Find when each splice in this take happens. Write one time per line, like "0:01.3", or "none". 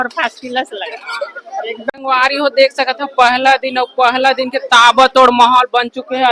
0:01.9